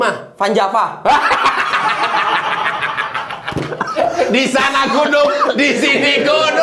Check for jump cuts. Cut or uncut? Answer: uncut